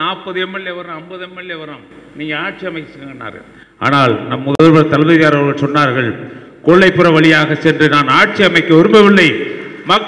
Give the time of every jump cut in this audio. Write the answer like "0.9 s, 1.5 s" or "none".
none